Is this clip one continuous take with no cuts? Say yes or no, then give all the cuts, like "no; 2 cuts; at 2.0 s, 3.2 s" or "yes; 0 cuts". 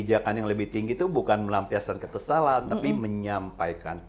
yes; 0 cuts